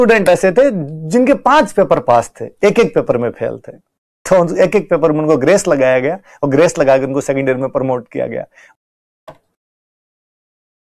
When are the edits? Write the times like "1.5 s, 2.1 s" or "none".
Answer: 8.6 s